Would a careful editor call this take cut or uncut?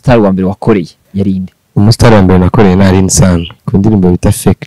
cut